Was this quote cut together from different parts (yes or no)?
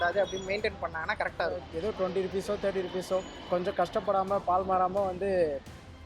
yes